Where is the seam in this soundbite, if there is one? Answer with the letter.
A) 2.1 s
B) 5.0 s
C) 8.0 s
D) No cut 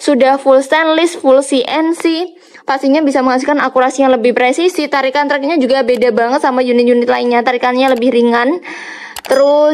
D